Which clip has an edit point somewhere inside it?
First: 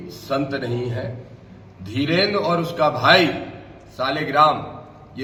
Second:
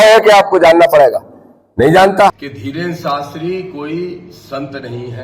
second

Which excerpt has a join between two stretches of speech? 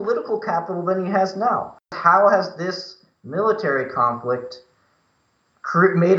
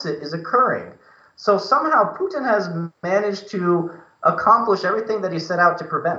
first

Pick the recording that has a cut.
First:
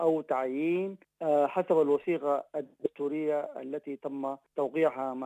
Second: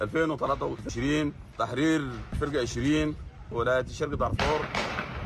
first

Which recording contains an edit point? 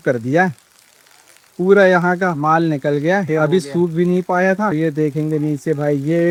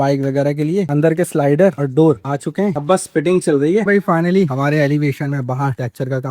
second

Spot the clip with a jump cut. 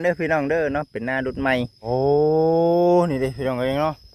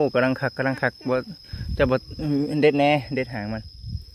first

